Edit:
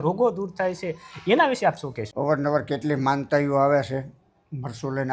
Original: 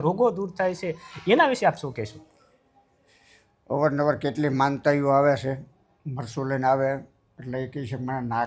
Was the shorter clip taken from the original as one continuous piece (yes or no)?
no